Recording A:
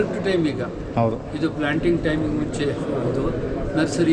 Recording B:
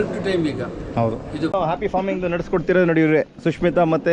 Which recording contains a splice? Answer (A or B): B